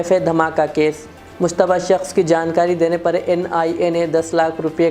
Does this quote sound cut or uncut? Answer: uncut